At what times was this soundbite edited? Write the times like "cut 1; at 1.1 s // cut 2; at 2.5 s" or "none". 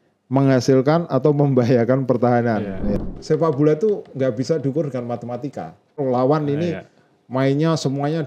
cut 1; at 3.1 s // cut 2; at 6.0 s